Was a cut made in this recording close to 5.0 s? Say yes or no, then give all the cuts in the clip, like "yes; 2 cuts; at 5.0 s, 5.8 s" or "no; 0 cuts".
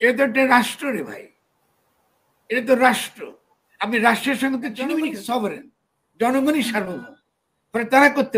yes; 1 cut; at 5.0 s